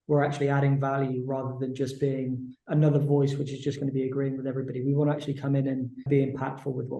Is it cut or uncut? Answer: cut